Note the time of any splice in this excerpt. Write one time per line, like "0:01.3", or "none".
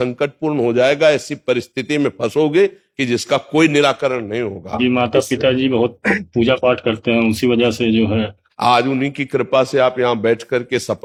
none